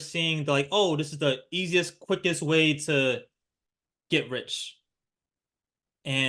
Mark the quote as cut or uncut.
uncut